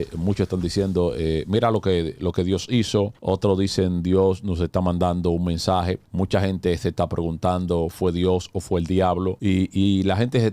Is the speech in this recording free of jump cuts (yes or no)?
no